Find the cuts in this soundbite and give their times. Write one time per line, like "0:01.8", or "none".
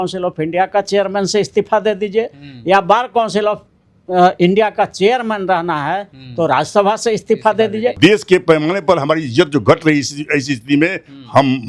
0:08.0